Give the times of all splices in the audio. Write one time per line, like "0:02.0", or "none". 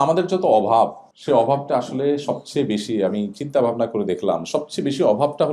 0:01.1